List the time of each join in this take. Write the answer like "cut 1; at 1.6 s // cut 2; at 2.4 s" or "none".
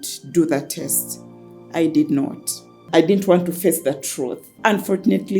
cut 1; at 2.8 s // cut 2; at 4.4 s